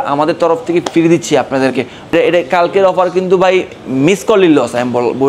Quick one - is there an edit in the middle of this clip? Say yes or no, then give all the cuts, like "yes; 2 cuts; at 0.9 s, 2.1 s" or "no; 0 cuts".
yes; 1 cut; at 2.1 s